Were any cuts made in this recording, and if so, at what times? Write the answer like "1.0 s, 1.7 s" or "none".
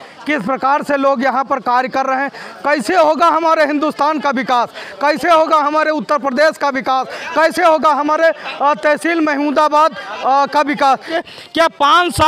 11.1 s